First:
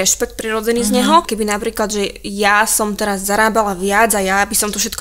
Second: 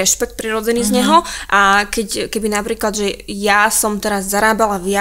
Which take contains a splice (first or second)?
first